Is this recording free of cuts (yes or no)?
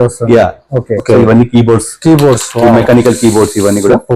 no